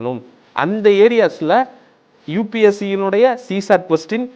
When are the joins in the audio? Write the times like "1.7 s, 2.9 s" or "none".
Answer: none